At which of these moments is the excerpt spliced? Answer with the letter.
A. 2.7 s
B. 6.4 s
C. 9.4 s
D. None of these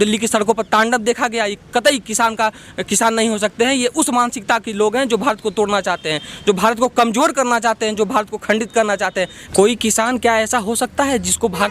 C